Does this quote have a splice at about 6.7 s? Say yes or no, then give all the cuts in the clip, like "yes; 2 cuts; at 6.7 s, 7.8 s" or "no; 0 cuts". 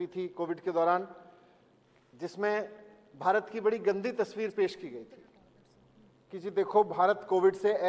no; 0 cuts